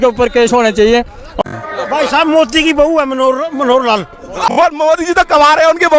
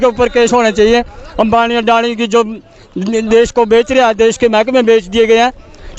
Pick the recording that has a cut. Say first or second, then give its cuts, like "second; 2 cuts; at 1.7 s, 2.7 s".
first; 2 cuts; at 1.4 s, 4.5 s